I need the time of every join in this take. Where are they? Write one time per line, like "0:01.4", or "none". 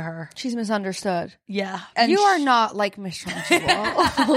0:01.9